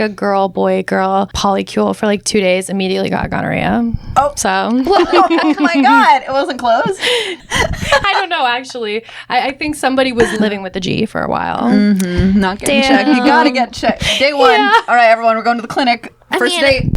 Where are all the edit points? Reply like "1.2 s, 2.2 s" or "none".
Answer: 1.3 s, 7.4 s, 10.3 s

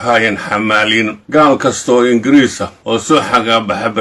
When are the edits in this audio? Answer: 1.2 s, 3.0 s

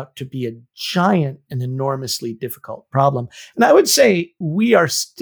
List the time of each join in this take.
4.3 s

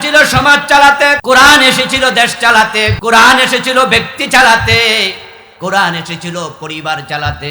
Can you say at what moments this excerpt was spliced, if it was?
1.2 s, 3.0 s

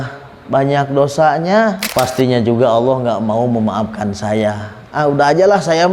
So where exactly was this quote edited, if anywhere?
1.8 s

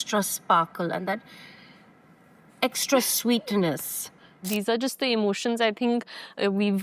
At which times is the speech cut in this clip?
4.5 s

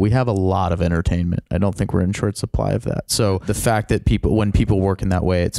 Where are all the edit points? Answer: 3.4 s

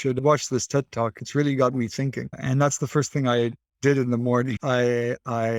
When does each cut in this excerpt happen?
none

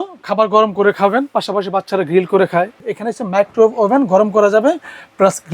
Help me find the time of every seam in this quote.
2.8 s

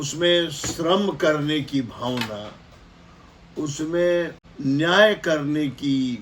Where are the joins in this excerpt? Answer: 4.4 s

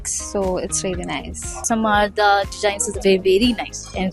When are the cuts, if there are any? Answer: 1.6 s

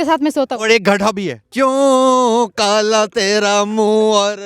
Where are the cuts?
1.4 s

